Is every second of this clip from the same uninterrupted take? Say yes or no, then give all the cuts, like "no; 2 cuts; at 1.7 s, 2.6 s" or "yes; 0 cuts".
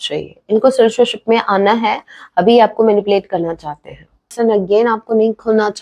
no; 1 cut; at 4.3 s